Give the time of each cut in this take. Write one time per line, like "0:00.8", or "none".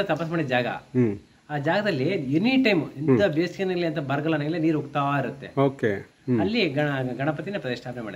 none